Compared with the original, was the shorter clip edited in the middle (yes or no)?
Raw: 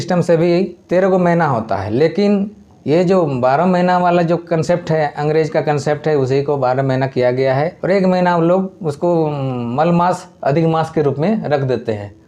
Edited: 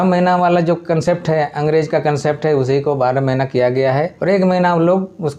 no